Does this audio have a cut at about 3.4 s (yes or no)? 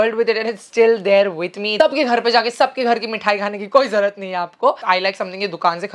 no